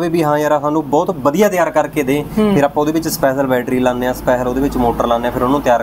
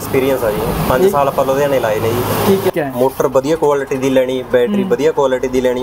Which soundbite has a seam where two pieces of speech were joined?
second; 1 cut; at 2.7 s

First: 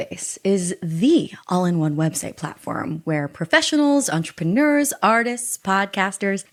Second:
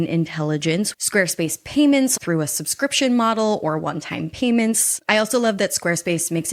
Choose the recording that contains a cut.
second; 3 cuts; at 1.0 s, 2.1 s, 4.9 s

